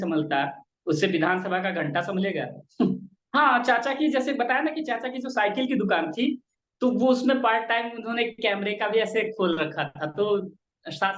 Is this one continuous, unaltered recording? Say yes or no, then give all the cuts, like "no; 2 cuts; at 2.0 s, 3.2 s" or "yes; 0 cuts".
no; 1 cut; at 3.1 s